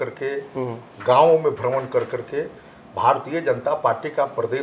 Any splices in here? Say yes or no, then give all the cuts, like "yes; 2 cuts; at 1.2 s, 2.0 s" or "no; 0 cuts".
no; 0 cuts